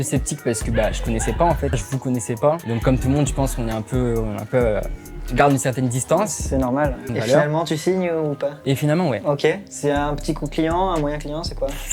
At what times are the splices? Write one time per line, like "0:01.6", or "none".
0:01.8
0:07.0